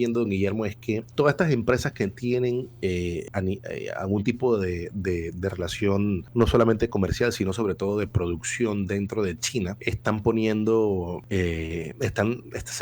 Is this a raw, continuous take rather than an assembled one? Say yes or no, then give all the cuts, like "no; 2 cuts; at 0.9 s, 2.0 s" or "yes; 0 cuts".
no; 5 cuts; at 1.1 s, 3.2 s, 6.2 s, 9.8 s, 11.7 s